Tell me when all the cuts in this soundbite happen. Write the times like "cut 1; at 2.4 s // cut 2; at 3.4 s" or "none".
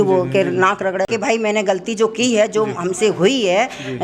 cut 1; at 1.1 s